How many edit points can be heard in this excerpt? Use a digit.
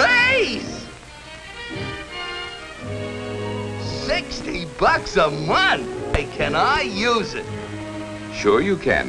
1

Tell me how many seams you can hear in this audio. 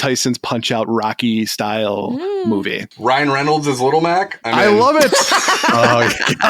1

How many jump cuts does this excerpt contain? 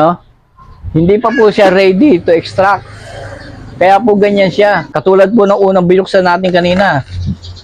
1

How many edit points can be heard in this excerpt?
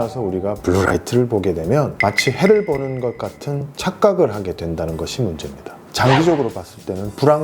1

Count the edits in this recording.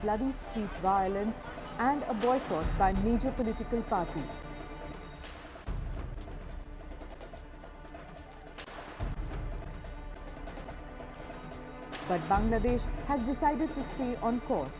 1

